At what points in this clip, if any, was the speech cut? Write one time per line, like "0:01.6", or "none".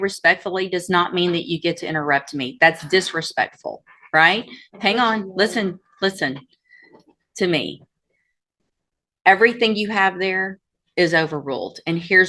none